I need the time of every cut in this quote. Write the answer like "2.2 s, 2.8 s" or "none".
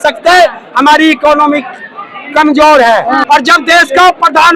3.2 s